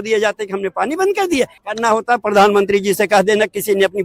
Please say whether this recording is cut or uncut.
cut